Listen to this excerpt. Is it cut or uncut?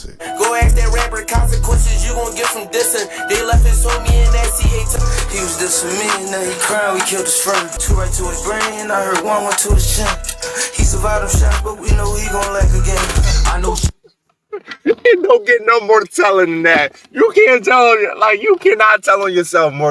cut